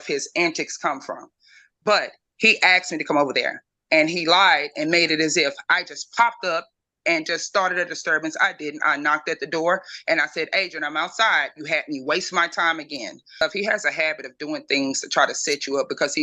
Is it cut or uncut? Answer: cut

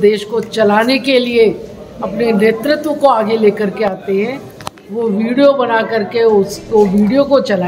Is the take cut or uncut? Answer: uncut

